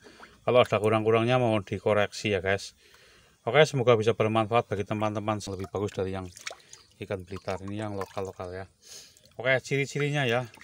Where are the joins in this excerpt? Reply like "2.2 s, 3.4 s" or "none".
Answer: 5.5 s